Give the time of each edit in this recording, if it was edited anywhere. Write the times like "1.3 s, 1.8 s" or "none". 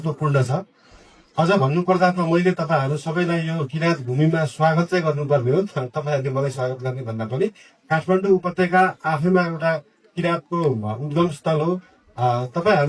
none